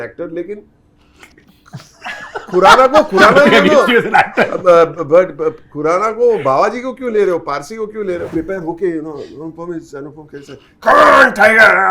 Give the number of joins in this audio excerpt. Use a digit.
1